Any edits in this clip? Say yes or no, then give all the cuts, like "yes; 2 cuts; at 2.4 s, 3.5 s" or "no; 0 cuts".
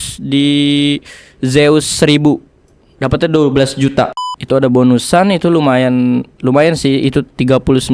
yes; 1 cut; at 4.1 s